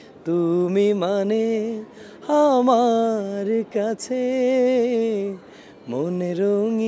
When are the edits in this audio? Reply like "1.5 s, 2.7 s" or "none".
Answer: none